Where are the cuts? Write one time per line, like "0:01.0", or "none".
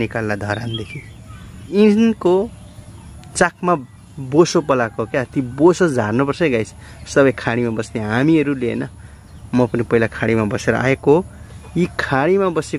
0:01.7